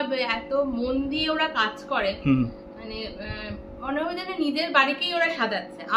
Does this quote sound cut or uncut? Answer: uncut